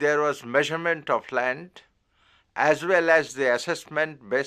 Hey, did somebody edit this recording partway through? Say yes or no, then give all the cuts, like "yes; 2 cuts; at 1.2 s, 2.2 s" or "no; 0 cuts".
yes; 1 cut; at 1.0 s